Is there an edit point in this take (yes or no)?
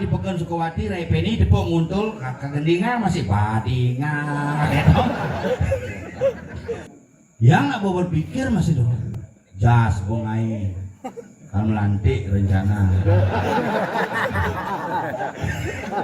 yes